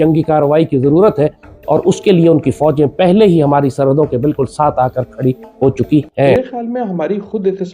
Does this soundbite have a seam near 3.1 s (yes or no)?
no